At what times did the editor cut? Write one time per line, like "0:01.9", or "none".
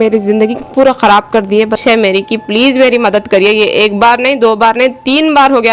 0:01.8